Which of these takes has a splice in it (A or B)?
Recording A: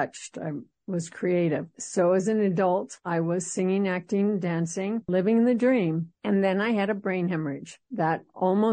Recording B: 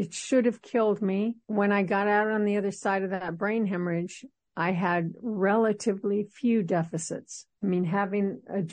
A